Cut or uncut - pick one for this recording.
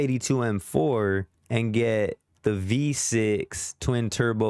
uncut